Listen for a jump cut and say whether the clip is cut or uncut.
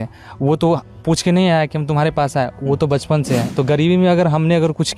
cut